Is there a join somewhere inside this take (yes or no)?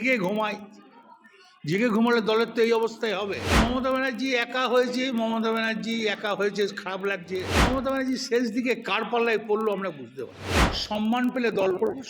yes